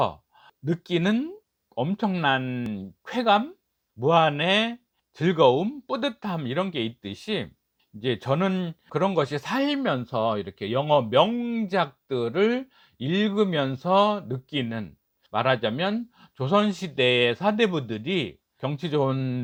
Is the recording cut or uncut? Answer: uncut